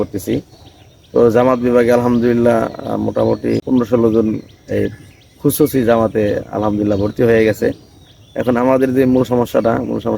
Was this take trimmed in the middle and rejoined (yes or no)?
yes